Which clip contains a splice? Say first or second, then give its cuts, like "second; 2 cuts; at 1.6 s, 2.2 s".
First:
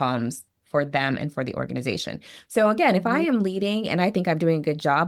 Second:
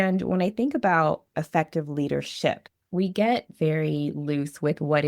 second; 2 cuts; at 1.3 s, 2.7 s